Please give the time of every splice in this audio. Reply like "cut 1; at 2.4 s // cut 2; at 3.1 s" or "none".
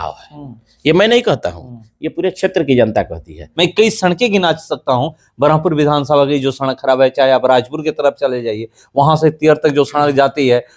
cut 1; at 3.4 s